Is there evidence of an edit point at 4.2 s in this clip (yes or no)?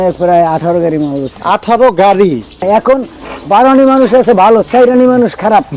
no